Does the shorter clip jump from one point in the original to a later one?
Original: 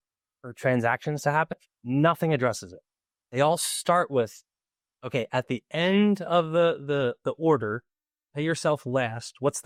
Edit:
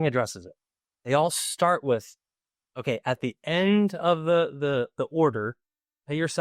no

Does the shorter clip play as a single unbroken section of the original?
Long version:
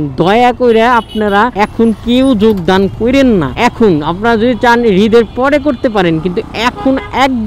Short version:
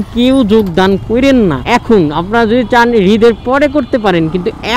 yes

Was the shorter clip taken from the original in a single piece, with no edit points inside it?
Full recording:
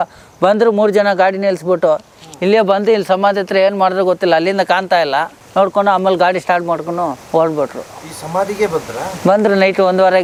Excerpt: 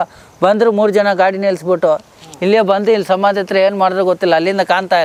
yes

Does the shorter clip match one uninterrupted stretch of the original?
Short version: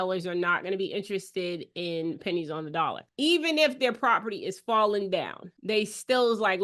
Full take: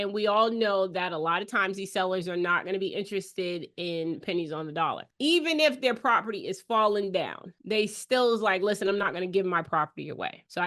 yes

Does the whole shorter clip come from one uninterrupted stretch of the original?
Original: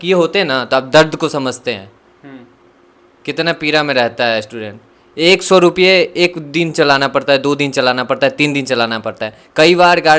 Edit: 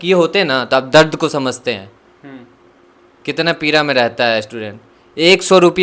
yes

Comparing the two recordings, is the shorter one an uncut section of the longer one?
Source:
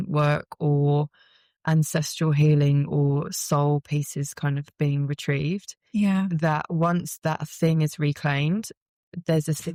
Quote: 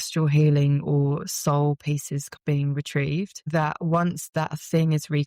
no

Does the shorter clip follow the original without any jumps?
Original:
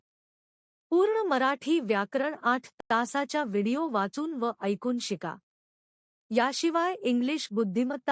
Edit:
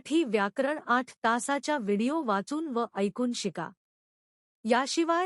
no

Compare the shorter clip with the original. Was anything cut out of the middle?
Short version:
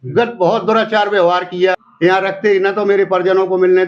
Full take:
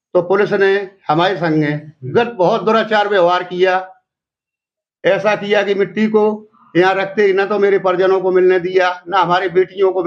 yes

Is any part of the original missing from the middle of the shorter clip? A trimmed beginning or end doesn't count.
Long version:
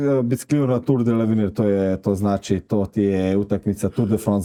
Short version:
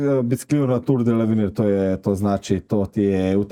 no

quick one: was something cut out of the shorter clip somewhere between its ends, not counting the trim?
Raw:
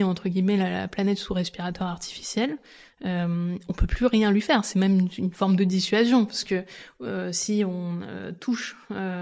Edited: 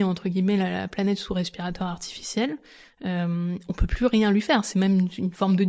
no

